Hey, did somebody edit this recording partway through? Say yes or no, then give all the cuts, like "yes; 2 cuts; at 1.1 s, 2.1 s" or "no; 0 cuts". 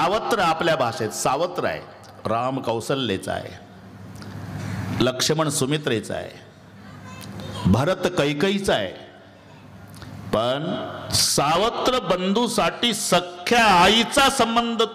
yes; 1 cut; at 11.2 s